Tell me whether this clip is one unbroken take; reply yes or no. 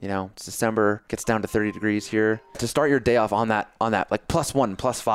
no